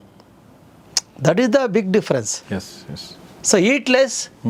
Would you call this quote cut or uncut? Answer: uncut